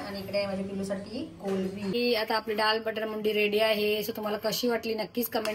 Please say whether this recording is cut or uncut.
cut